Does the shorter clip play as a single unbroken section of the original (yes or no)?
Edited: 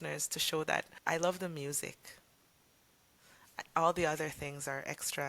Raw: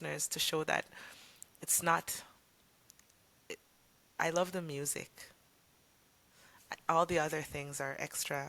no